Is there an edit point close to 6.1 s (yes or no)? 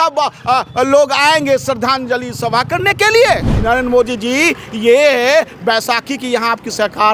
no